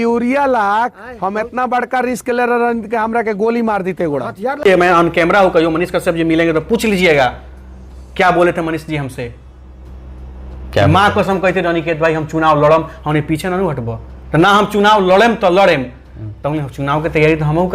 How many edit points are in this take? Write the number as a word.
one